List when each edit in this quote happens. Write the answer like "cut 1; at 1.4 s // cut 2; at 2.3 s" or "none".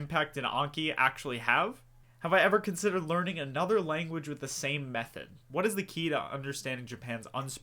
cut 1; at 1.9 s // cut 2; at 5.5 s